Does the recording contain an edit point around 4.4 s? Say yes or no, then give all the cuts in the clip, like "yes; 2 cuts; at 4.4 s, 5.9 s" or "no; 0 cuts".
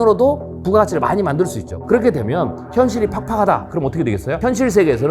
yes; 2 cuts; at 1.6 s, 4.4 s